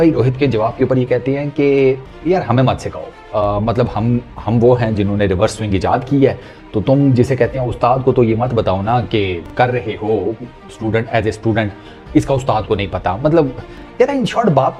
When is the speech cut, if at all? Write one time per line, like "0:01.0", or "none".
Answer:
none